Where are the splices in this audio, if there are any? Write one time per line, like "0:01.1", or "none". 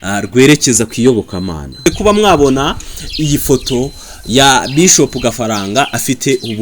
0:01.9